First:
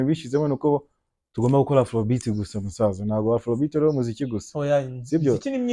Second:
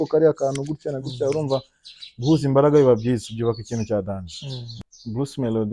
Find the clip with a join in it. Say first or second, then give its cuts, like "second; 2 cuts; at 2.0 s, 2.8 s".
second; 1 cut; at 4.7 s